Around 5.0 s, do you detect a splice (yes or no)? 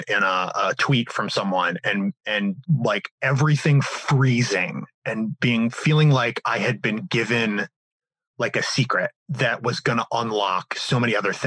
no